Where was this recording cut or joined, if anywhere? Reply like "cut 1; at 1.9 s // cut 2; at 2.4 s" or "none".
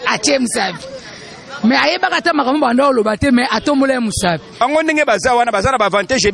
cut 1; at 4.6 s